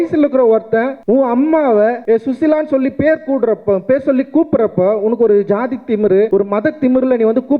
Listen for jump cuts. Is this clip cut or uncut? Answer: cut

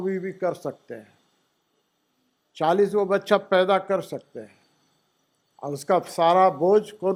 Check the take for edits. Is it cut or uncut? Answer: uncut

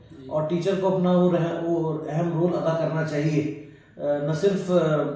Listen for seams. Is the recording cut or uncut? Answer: uncut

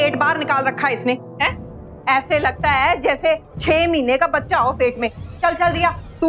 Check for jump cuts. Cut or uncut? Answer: uncut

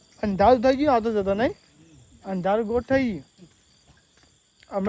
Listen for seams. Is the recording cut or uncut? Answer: uncut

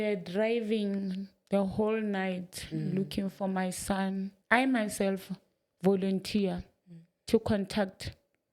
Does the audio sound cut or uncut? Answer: cut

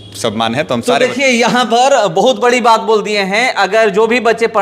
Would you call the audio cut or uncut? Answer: uncut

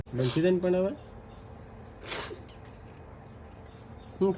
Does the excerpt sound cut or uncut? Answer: uncut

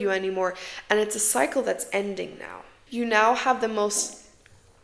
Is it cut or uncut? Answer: cut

